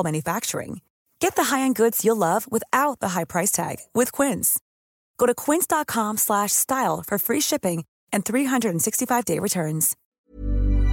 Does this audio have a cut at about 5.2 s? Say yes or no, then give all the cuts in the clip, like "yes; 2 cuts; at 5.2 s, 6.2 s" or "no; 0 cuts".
no; 1 cut; at 10.0 s